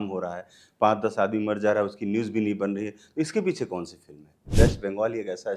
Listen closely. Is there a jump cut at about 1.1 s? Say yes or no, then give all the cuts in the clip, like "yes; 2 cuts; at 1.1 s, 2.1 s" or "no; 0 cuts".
no; 1 cut; at 4.5 s